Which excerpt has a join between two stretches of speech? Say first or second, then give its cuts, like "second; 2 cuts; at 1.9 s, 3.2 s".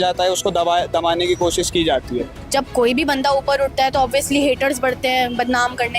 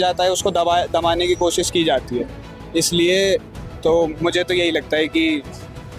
first; 1 cut; at 2.4 s